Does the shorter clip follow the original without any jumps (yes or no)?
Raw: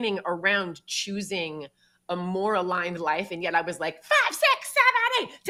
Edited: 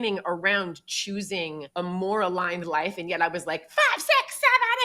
no